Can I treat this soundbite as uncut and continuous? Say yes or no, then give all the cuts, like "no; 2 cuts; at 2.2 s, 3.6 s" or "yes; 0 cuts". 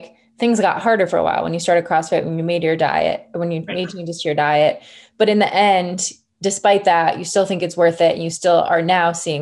yes; 0 cuts